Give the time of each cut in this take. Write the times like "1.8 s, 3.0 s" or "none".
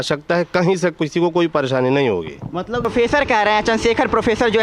2.7 s